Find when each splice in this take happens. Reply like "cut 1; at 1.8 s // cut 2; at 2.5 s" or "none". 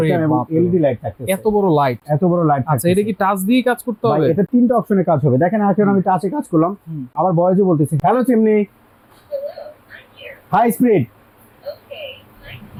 none